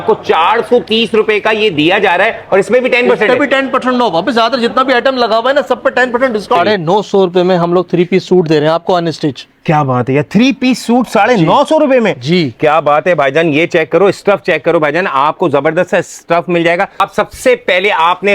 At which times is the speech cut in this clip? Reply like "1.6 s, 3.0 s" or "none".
6.6 s, 17.0 s